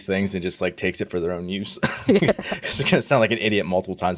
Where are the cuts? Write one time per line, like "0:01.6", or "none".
none